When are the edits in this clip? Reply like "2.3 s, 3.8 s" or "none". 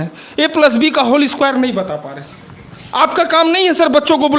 1.9 s